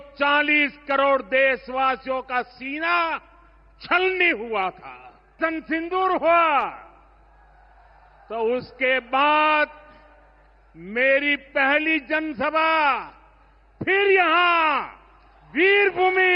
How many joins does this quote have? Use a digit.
1